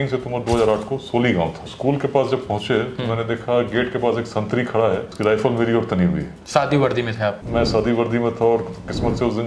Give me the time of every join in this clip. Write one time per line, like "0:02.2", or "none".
0:01.6
0:05.1
0:06.3
0:07.4